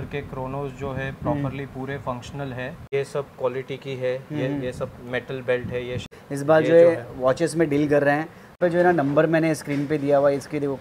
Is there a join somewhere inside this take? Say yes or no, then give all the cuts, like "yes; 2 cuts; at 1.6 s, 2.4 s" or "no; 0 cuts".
yes; 3 cuts; at 2.8 s, 6.1 s, 8.6 s